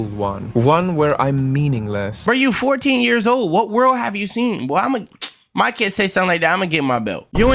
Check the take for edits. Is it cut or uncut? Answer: cut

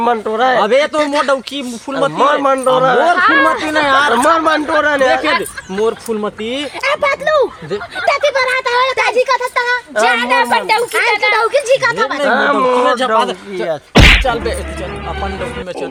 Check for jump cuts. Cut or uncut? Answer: uncut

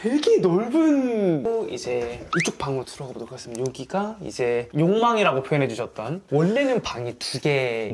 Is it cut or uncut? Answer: cut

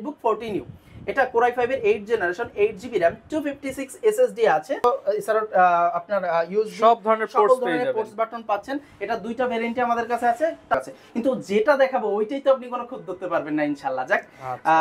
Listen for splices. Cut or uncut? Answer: cut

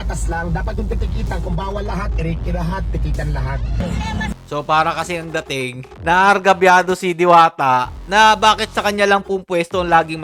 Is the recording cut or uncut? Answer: uncut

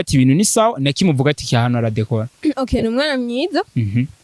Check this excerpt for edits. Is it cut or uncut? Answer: cut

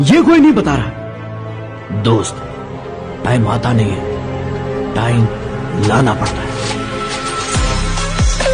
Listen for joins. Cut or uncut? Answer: uncut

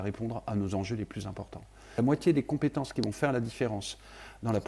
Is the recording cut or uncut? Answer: cut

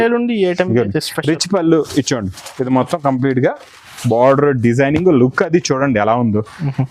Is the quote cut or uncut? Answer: uncut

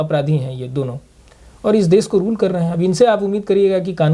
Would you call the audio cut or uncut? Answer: uncut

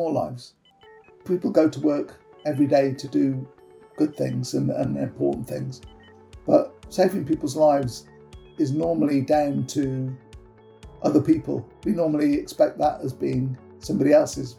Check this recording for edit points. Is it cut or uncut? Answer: cut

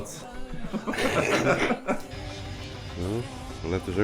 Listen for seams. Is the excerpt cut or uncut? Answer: cut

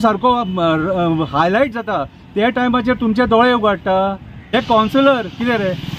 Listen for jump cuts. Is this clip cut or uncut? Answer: cut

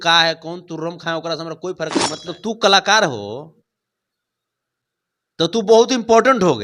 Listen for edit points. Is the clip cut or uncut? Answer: cut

